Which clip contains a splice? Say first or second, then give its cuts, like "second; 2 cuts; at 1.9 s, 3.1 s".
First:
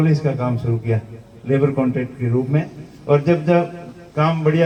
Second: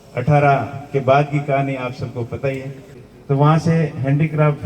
second; 1 cut; at 2.9 s